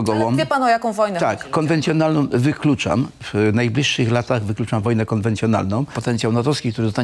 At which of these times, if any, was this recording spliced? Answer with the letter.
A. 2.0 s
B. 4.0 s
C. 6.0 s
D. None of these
C